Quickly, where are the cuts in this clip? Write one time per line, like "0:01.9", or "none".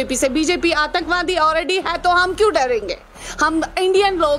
none